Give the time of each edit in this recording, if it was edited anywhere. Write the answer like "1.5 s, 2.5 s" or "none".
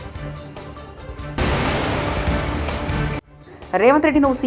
1.2 s, 3.3 s